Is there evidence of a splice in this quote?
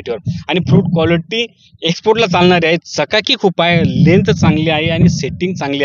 no; 0 cuts

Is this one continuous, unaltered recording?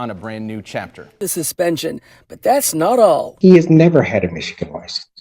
no; 1 cut; at 1.2 s

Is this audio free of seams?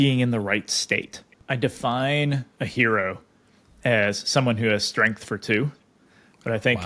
no; 1 cut; at 1.3 s

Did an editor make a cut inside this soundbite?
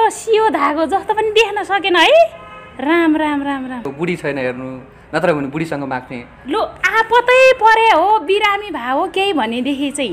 yes; 1 cut; at 3.9 s

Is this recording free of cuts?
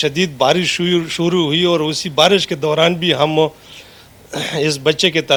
yes; 0 cuts

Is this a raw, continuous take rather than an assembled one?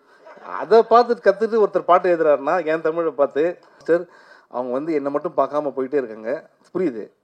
no; 1 cut; at 3.8 s

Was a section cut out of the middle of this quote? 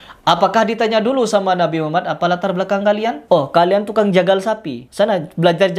yes; 1 cut; at 3.2 s

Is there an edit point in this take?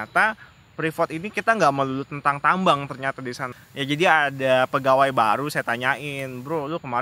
yes; 1 cut; at 3.5 s

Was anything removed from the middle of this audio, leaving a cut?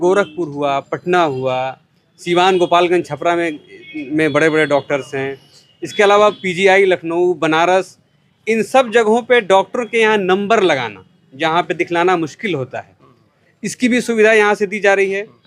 no; 0 cuts

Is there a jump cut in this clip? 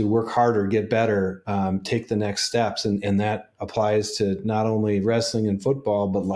no; 0 cuts

